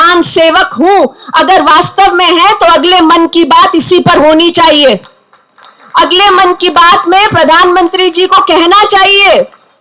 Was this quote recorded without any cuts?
yes; 0 cuts

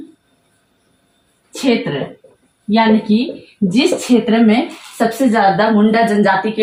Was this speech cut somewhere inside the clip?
no; 0 cuts

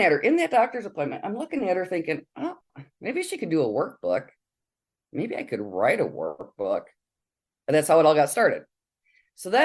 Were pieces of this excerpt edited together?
no; 0 cuts

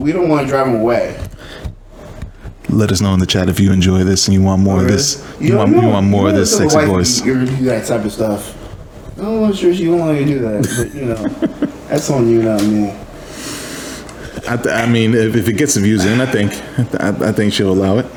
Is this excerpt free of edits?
yes; 0 cuts

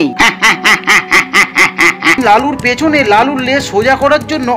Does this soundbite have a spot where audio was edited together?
yes; 1 cut; at 2.2 s

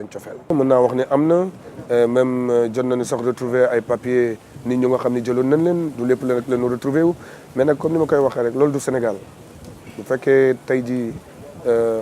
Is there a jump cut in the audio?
yes; 1 cut; at 3.2 s

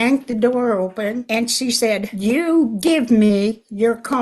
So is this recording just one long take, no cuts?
no; 2 cuts; at 1.3 s, 2.2 s

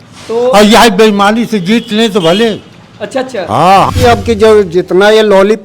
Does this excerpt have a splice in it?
yes; 1 cut; at 3.9 s

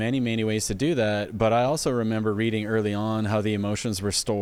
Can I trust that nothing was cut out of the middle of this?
yes; 0 cuts

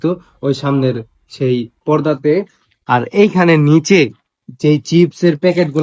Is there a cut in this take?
no; 0 cuts

